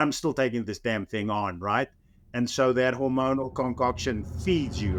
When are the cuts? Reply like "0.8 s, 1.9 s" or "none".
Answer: none